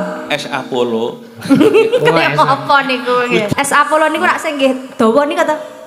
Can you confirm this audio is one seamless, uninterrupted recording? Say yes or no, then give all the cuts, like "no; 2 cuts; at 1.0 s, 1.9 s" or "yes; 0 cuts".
no; 1 cut; at 3.5 s